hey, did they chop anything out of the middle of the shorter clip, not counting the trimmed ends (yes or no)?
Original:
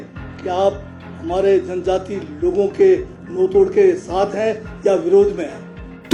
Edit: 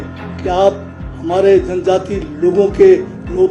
no